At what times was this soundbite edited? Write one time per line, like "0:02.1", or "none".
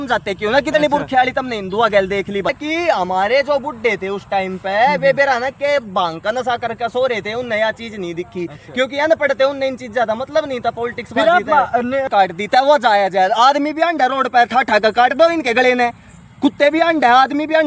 0:02.5
0:12.1